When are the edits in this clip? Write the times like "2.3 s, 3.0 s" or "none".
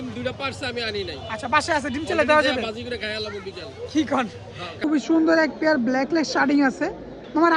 4.8 s